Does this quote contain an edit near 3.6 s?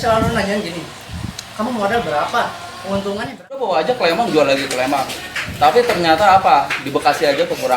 yes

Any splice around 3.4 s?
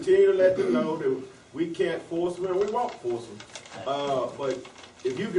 yes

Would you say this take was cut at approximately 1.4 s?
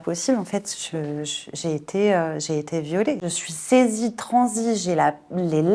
no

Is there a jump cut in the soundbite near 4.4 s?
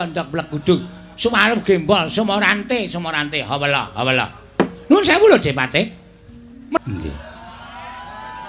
no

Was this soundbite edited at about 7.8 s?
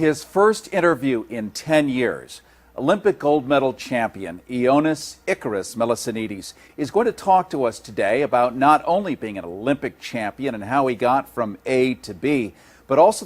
yes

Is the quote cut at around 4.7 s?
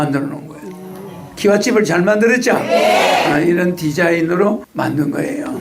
yes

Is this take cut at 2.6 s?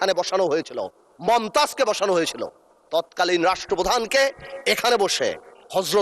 no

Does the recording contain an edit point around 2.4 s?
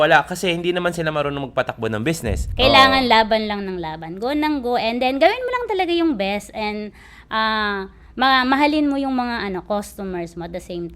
yes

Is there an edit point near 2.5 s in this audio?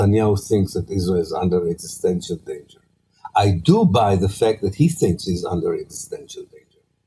no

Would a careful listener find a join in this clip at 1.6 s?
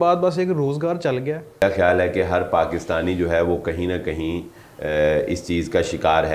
yes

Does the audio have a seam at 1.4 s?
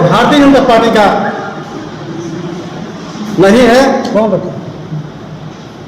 no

